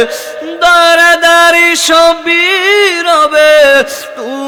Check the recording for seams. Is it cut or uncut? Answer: uncut